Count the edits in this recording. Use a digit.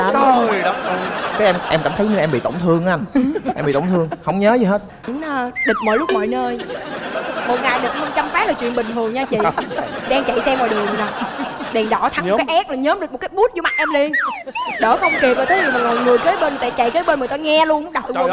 1